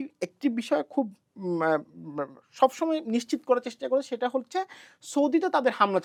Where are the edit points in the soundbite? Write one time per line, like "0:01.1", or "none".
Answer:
none